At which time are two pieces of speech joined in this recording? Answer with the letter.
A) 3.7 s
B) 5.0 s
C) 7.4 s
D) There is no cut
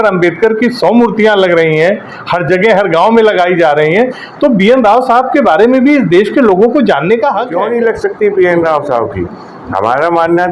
C